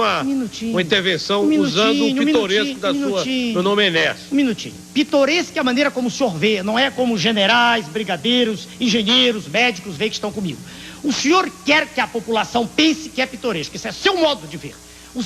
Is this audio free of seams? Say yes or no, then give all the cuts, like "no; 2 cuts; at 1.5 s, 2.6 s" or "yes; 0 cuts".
yes; 0 cuts